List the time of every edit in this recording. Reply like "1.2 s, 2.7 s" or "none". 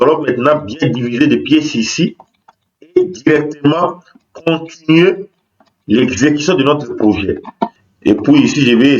7.8 s